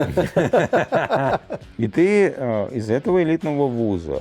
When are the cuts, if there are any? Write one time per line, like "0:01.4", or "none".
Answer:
0:01.6